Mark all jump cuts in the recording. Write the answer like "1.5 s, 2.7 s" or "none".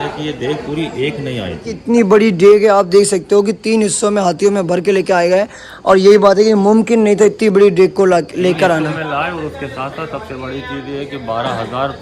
1.8 s